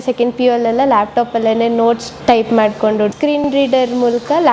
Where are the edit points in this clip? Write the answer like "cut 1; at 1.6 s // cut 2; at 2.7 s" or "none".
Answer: cut 1; at 2.1 s // cut 2; at 3.4 s

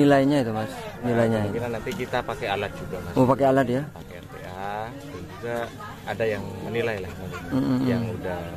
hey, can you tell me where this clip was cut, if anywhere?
cut 1; at 1.0 s

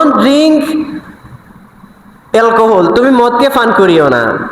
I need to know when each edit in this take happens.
none

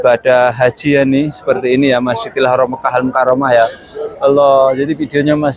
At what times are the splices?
none

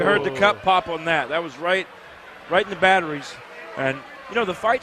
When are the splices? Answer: cut 1; at 1.5 s

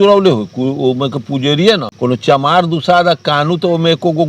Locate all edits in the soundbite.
cut 1; at 1.9 s

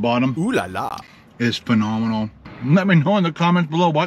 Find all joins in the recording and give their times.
cut 1; at 1.0 s // cut 2; at 2.4 s

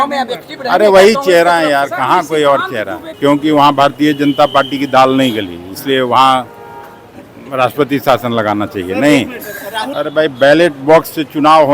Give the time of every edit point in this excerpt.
cut 1; at 3.0 s // cut 2; at 9.9 s

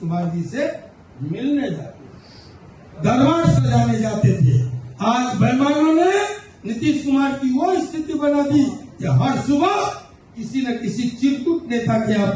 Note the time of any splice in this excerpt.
none

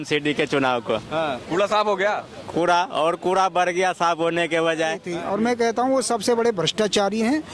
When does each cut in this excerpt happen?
cut 1; at 5.1 s

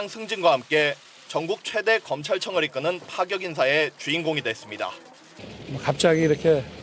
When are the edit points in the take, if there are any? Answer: none

